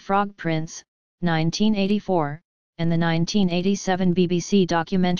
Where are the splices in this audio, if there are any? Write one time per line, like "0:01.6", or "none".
none